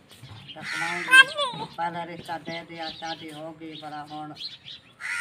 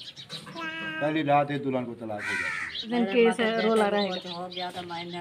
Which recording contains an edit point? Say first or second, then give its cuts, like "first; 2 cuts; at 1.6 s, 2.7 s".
second; 1 cut; at 2.9 s